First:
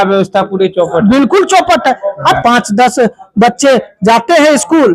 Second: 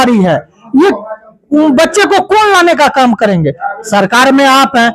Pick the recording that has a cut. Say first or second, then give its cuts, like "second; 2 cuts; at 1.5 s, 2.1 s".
first; 1 cut; at 2.4 s